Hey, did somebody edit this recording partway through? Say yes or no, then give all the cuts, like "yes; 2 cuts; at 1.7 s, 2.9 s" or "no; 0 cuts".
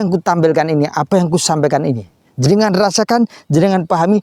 no; 0 cuts